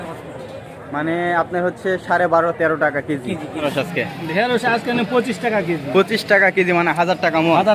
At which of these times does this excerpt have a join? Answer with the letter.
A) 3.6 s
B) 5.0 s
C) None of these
A